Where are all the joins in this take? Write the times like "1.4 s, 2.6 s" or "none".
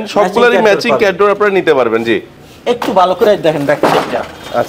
2.3 s